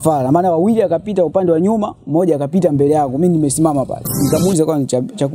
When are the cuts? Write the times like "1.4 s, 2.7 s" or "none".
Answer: 4.3 s